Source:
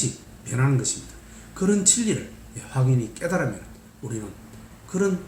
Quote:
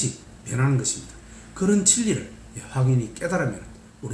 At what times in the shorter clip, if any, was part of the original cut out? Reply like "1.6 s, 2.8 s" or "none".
none